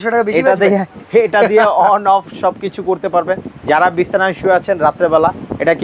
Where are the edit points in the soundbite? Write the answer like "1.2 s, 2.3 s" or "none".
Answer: none